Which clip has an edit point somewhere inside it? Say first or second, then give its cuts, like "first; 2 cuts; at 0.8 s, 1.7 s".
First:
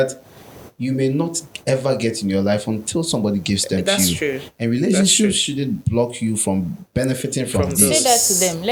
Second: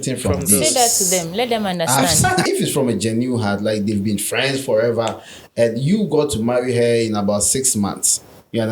second; 1 cut; at 2.4 s